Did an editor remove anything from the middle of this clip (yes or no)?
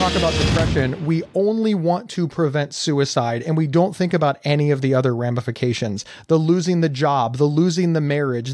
no